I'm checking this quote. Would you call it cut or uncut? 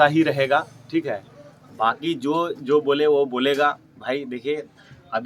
uncut